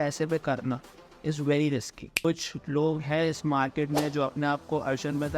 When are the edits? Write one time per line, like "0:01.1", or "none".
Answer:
0:02.2